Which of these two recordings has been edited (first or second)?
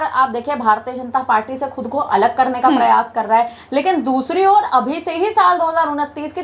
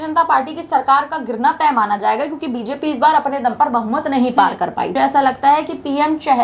second